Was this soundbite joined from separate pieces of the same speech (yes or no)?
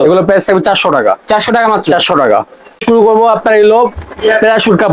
yes